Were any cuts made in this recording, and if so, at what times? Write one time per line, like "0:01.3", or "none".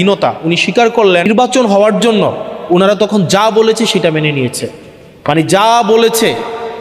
0:01.3